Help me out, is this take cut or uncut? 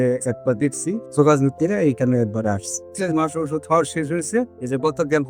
cut